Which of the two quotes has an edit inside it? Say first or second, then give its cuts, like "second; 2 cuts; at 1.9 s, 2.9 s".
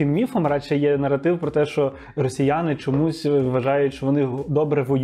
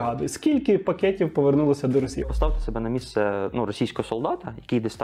second; 1 cut; at 2.2 s